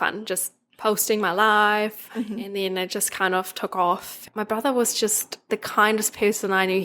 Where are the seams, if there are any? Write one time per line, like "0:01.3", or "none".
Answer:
0:04.2
0:05.5